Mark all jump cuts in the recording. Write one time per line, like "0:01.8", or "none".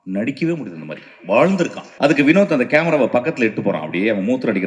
0:01.8